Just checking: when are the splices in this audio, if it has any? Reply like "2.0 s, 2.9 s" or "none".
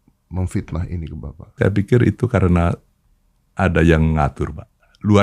1.5 s